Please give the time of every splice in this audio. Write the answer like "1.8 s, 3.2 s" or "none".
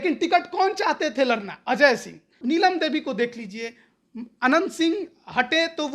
2.3 s